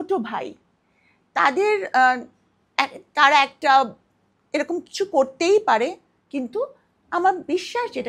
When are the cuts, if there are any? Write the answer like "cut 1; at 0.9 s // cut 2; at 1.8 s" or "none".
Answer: none

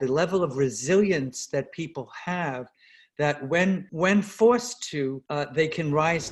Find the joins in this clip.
cut 1; at 3.9 s // cut 2; at 5.2 s

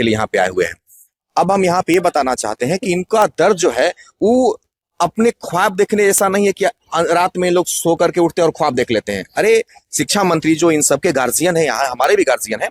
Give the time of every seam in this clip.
none

